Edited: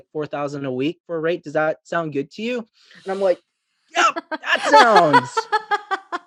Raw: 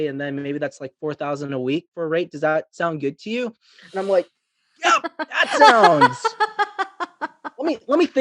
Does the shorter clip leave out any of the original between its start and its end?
no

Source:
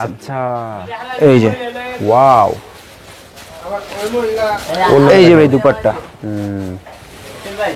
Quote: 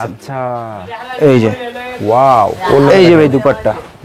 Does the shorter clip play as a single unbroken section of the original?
no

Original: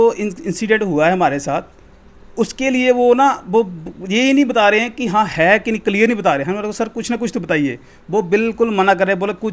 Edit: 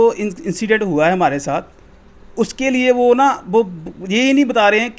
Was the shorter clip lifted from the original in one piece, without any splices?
yes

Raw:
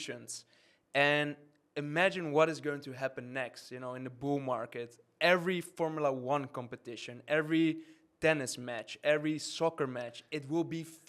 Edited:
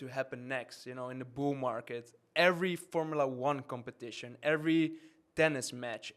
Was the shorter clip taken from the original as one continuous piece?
yes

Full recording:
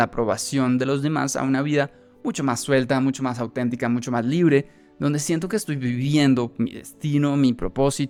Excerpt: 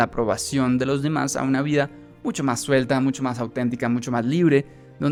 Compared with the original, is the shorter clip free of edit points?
yes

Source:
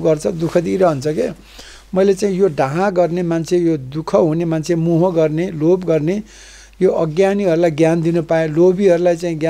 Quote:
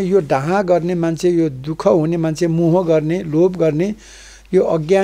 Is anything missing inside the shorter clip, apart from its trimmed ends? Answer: no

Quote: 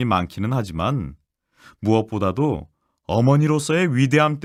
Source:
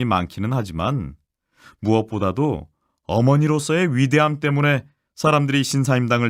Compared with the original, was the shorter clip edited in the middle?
no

